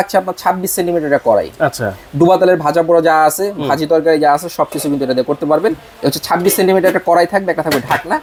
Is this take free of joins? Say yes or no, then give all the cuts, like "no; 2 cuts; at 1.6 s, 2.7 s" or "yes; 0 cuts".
yes; 0 cuts